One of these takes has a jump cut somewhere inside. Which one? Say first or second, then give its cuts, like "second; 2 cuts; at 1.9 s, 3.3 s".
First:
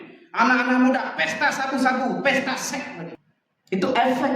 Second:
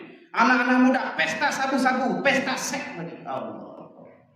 first; 1 cut; at 3.1 s